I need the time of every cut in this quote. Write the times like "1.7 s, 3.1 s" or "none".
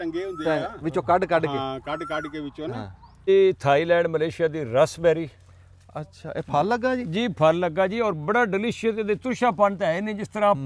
3.3 s